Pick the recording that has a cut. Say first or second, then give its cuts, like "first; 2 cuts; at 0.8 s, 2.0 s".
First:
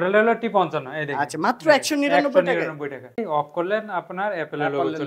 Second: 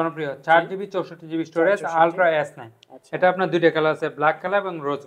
first; 1 cut; at 3.2 s